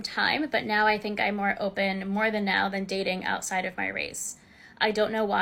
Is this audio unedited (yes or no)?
yes